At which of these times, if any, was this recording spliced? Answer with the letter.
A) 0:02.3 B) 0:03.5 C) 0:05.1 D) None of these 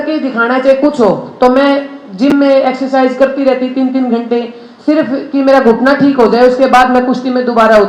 D